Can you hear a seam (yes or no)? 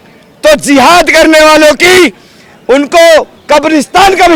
no